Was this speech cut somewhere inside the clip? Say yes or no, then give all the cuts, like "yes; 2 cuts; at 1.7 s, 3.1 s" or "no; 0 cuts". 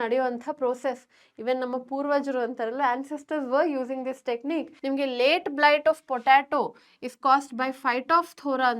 yes; 1 cut; at 4.7 s